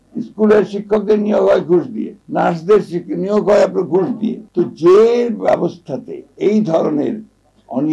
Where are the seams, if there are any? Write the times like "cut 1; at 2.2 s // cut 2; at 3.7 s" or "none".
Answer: none